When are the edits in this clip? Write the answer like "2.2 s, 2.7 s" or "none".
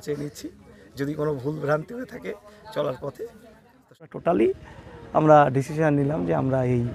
4.0 s